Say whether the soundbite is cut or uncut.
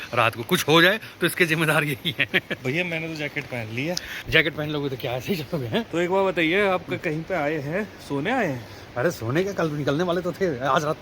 uncut